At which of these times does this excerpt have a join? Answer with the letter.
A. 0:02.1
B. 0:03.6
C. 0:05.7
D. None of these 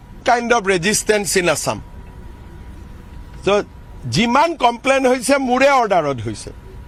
D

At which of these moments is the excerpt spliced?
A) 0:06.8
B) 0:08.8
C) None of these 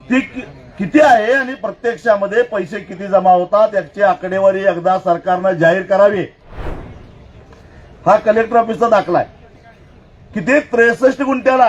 A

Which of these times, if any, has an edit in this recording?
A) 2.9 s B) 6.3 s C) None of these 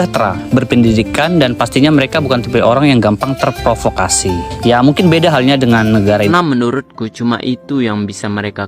B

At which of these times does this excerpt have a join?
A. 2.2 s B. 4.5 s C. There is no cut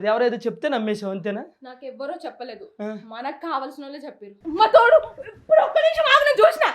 B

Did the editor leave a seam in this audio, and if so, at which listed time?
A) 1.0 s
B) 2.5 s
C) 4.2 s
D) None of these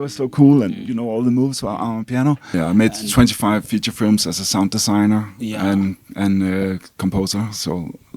B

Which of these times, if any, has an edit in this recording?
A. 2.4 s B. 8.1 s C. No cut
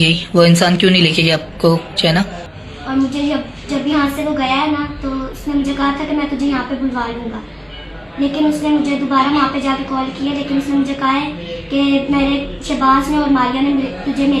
A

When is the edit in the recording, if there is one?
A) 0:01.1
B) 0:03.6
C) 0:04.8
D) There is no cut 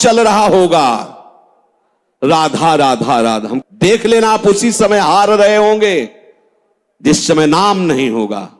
B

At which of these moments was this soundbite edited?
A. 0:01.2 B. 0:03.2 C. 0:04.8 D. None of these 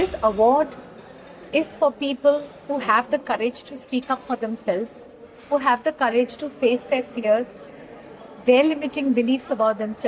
D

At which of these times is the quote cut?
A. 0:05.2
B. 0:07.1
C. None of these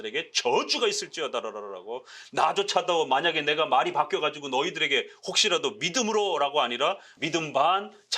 B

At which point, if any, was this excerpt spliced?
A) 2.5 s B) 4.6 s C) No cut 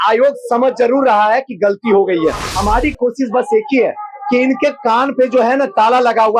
A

